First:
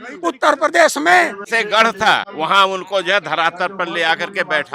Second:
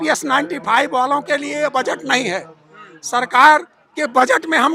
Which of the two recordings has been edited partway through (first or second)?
first